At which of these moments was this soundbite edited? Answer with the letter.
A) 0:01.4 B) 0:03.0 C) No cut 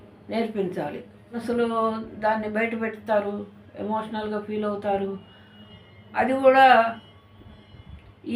A